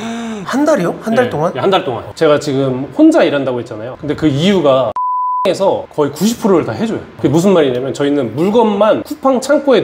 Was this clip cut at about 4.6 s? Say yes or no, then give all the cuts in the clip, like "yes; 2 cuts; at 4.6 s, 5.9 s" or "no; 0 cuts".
no; 1 cut; at 2.1 s